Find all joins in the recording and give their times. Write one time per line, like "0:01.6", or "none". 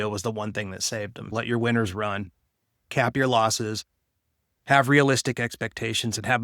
0:01.2

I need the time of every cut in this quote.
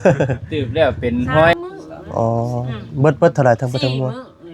0:01.5

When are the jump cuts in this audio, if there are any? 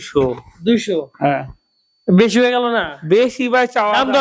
none

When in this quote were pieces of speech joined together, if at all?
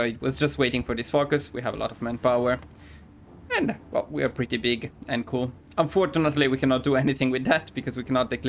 none

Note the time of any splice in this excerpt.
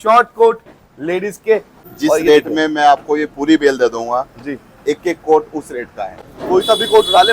0:01.8
0:06.3

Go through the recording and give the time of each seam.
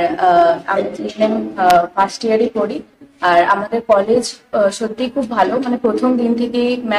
none

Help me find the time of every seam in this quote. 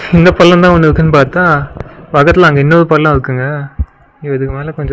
none

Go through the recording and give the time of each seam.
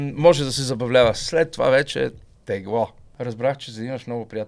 0:03.0

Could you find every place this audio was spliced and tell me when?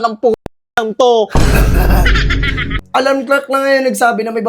0:02.7

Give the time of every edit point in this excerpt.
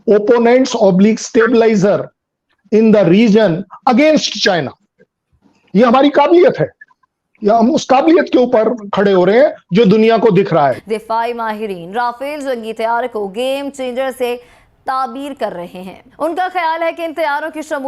0:10.8

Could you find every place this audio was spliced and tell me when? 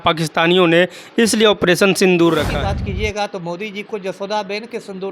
0:02.5

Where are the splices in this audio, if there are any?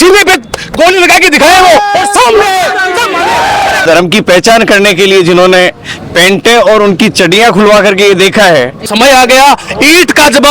0:03.8
0:08.9

